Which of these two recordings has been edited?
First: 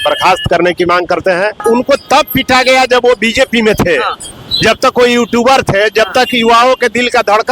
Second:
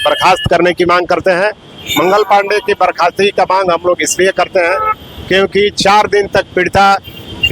first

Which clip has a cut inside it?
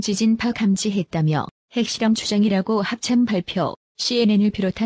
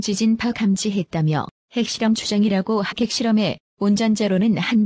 first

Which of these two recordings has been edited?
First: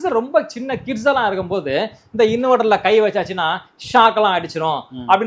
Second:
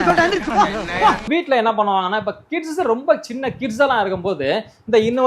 second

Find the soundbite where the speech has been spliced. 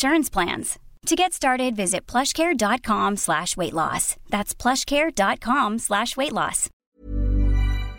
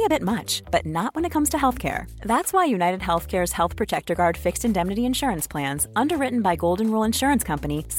first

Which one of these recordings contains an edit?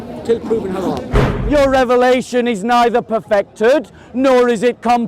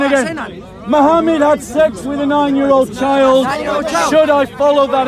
first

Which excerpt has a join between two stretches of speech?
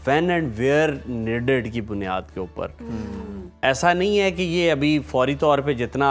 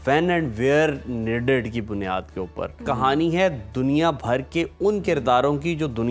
second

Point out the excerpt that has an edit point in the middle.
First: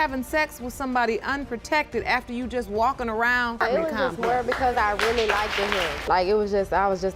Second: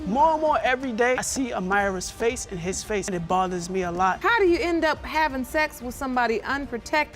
second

